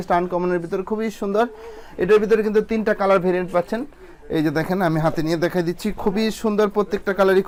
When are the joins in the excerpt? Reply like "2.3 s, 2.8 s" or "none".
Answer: none